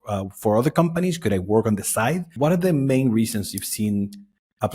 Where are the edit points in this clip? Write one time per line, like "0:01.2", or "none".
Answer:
0:02.3